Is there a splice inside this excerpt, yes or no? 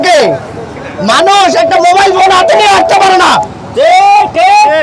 no